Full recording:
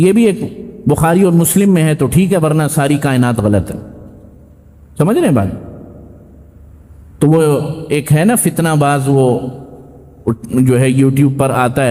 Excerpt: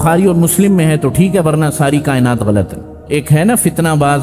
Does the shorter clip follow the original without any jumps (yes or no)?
no